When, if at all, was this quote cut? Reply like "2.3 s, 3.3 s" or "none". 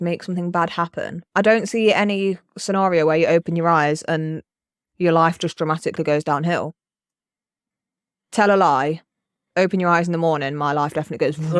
1.2 s